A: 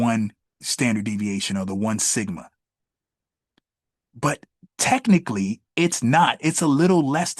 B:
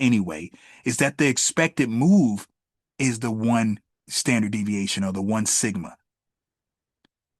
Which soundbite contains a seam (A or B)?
A